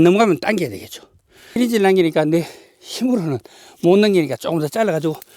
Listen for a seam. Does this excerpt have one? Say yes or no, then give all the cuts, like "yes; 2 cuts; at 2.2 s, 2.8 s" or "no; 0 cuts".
yes; 1 cut; at 1.6 s